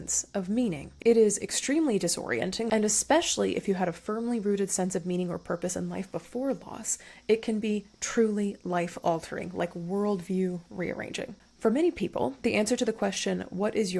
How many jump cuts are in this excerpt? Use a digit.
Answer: 3